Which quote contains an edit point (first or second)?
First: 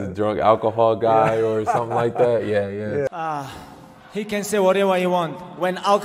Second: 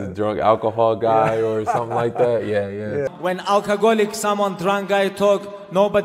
second